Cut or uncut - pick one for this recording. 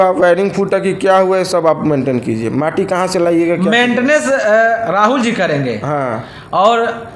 uncut